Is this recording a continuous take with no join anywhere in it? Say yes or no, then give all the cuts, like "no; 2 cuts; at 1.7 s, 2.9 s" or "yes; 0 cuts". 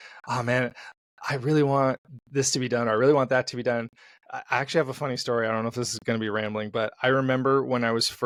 yes; 0 cuts